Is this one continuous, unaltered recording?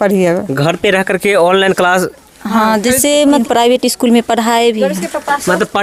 yes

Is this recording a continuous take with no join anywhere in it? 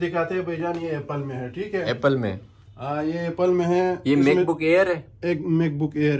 yes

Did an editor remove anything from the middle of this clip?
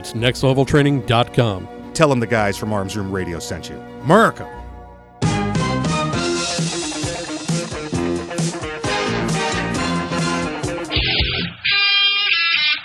yes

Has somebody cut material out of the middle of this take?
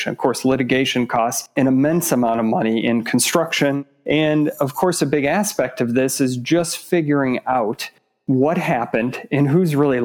yes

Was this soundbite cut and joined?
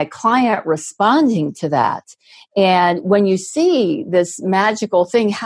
no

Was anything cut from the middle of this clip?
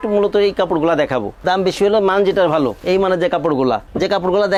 no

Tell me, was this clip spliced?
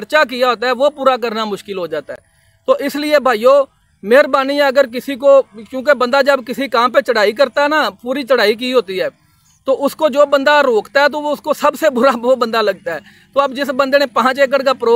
no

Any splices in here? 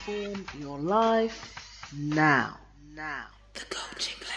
yes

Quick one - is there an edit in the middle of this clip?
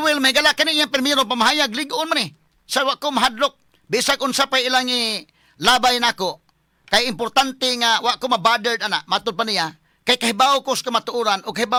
no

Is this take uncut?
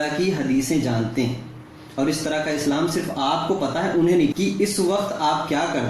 no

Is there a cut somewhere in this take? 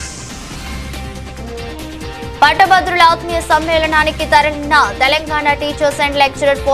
yes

